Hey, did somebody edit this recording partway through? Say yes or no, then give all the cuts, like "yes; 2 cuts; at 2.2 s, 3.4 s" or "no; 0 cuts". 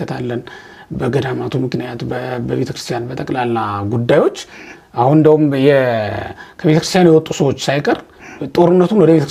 no; 0 cuts